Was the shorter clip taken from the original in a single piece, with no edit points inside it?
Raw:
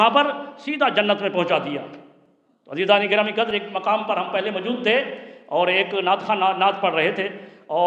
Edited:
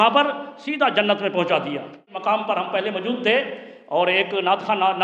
no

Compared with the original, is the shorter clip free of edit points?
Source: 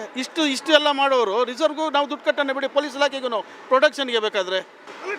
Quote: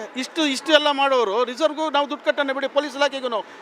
yes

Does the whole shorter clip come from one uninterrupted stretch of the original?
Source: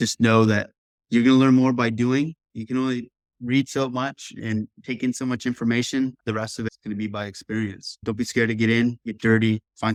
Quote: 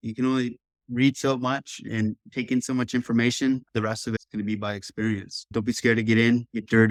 yes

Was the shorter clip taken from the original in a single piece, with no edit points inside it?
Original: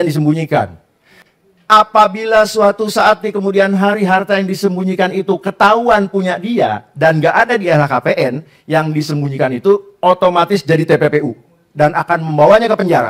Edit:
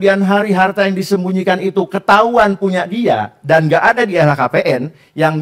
yes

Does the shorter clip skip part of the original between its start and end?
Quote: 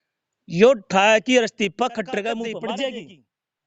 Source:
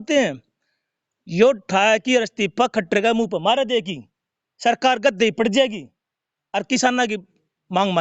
yes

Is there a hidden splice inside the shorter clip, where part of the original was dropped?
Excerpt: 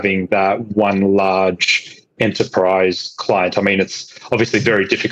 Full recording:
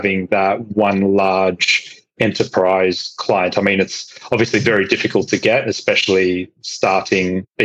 no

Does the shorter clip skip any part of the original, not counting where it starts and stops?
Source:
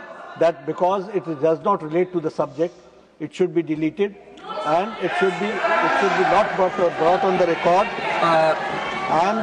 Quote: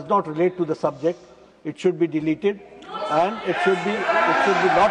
no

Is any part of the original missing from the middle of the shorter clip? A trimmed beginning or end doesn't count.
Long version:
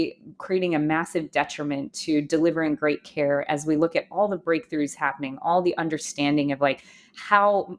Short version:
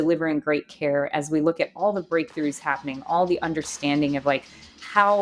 no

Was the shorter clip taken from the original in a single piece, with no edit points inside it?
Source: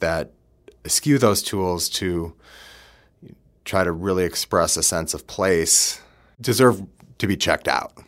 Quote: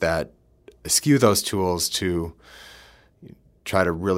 yes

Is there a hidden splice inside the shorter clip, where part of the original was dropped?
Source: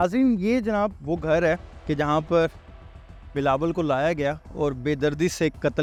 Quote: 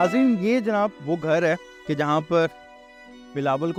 no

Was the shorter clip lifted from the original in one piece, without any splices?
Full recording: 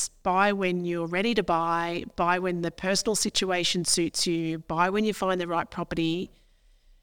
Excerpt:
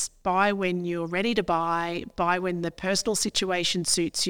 yes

